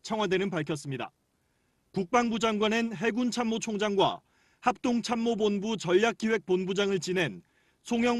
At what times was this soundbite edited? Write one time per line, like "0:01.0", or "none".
0:06.4